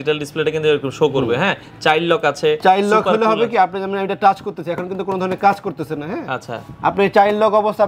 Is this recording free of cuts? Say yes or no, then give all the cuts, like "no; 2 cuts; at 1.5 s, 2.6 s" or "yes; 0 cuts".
yes; 0 cuts